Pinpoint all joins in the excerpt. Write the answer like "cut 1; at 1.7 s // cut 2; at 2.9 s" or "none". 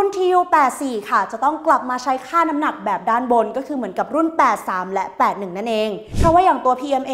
cut 1; at 6.1 s